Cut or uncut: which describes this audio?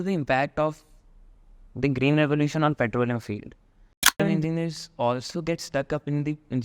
cut